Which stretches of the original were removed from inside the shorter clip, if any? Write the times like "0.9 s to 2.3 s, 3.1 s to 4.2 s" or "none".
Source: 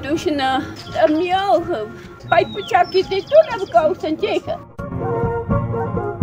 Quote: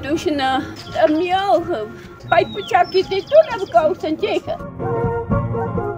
4.7 s to 4.9 s